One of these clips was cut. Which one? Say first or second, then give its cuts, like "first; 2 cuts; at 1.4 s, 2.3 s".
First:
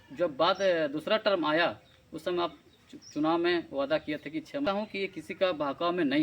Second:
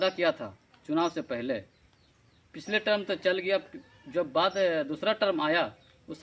first; 1 cut; at 4.7 s